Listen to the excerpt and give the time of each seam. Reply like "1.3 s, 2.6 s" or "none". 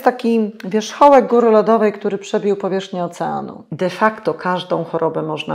3.6 s